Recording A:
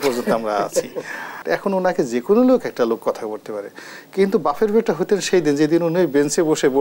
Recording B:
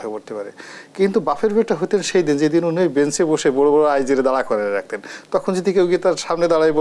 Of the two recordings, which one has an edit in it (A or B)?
A